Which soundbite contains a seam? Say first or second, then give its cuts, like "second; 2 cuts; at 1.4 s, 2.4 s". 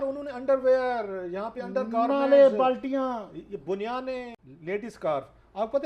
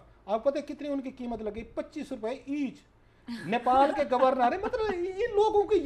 first; 1 cut; at 4.3 s